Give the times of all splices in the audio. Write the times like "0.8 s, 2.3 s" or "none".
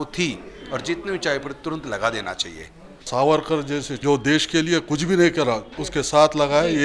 3.1 s, 3.9 s, 5.8 s